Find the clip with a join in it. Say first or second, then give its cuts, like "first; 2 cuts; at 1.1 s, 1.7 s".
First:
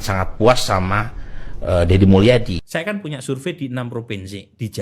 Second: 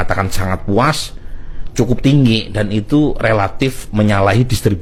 first; 1 cut; at 2.6 s